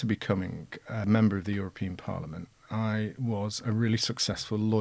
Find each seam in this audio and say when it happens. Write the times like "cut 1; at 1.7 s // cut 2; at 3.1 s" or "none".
cut 1; at 1.0 s